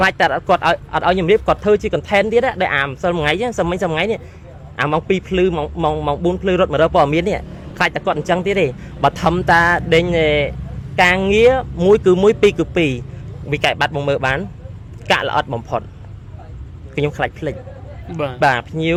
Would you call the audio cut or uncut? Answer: uncut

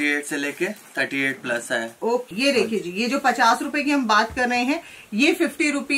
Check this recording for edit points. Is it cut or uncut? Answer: cut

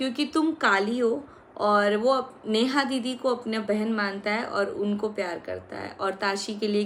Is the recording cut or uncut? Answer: uncut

